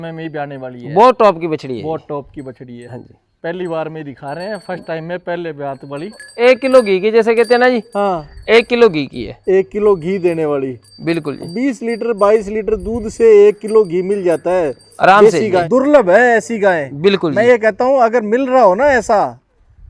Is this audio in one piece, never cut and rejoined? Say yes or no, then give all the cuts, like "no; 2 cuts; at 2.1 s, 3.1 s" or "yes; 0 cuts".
no; 2 cuts; at 6.3 s, 15.6 s